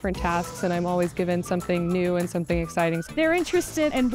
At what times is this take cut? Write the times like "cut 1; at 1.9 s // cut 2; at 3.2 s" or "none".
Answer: cut 1; at 3.0 s